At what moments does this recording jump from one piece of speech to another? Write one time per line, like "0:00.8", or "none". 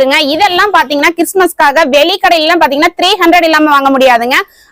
none